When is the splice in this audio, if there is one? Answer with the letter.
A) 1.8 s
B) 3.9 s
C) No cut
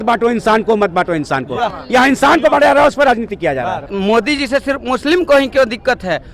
B